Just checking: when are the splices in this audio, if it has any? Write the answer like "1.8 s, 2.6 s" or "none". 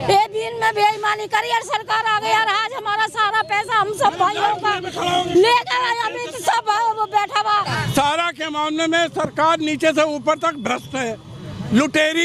7.8 s